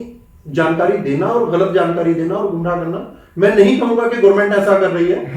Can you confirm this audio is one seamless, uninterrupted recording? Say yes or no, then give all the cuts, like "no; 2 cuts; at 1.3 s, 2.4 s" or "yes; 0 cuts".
yes; 0 cuts